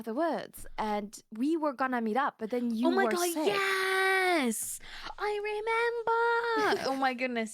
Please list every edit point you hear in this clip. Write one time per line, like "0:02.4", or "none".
none